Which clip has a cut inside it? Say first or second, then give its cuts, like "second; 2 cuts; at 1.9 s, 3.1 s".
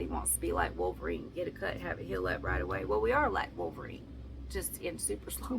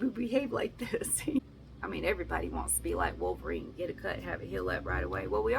second; 1 cut; at 1.4 s